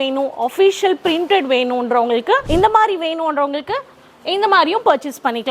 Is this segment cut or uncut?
cut